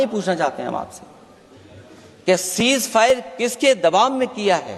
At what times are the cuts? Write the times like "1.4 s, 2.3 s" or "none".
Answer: none